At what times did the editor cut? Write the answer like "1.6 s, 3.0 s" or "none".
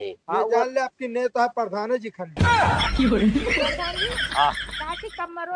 2.2 s, 3.6 s